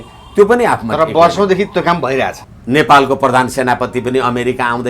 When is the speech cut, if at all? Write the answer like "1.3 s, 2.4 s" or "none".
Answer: 2.5 s